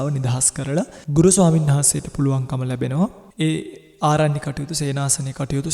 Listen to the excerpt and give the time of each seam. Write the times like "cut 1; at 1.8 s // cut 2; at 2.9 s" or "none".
cut 1; at 1.0 s // cut 2; at 3.2 s